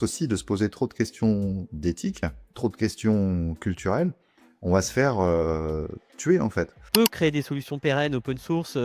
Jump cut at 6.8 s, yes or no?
yes